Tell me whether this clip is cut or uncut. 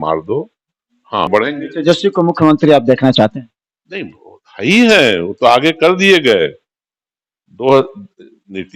cut